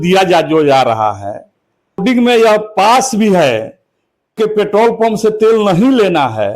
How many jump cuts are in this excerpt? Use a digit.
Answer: 2